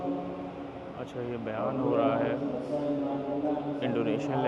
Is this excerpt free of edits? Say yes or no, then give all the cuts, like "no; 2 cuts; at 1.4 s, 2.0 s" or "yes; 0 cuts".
yes; 0 cuts